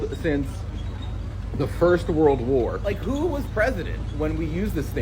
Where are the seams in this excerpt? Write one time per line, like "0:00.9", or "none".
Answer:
none